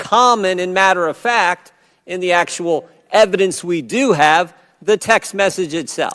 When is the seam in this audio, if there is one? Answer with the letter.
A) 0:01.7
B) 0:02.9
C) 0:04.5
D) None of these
D